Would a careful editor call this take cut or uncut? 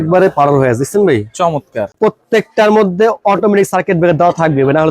cut